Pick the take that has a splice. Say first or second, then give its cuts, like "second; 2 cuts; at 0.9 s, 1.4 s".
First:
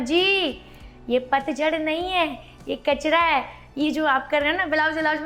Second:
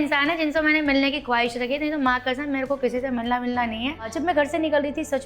second; 1 cut; at 4.1 s